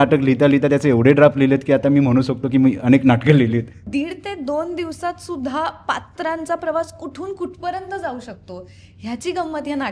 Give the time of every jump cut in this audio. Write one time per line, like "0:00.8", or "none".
0:03.8